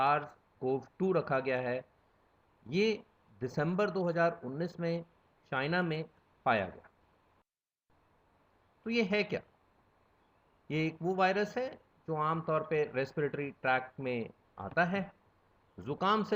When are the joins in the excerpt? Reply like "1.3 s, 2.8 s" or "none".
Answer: 7.4 s